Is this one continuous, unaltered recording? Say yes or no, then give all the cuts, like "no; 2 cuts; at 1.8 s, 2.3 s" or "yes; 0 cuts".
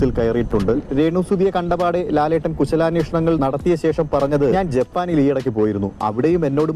yes; 0 cuts